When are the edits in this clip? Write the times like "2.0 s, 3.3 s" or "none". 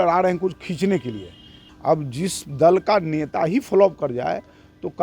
1.6 s